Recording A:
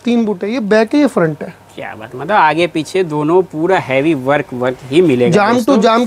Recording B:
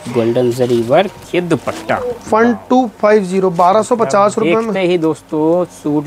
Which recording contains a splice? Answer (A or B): B